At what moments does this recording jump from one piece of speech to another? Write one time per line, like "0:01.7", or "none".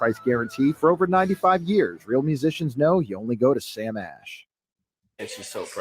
0:04.8